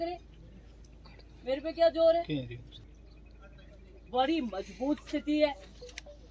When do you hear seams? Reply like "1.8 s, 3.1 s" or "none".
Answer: 2.8 s